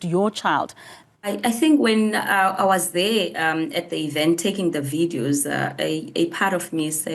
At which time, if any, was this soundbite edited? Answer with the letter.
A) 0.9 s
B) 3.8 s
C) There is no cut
A